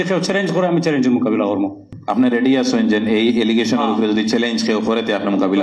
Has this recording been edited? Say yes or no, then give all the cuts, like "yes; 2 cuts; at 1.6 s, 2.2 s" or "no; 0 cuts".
yes; 1 cut; at 1.9 s